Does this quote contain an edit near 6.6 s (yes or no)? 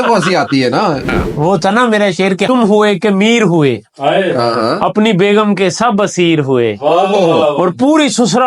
no